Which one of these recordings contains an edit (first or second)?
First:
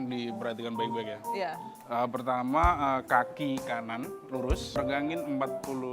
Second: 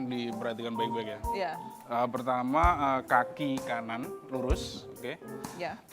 first